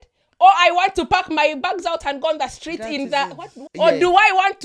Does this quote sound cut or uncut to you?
cut